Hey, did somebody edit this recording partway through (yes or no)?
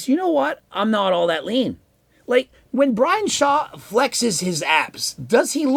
no